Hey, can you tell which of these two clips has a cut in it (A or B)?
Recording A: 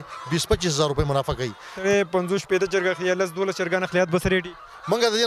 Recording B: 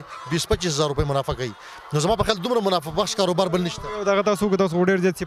A